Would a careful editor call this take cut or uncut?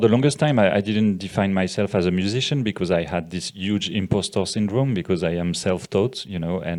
uncut